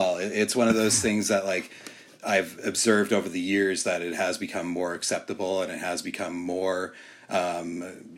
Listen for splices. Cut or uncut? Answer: uncut